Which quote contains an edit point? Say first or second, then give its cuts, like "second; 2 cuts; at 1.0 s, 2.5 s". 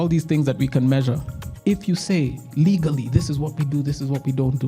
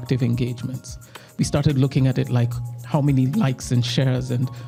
first; 1 cut; at 1.4 s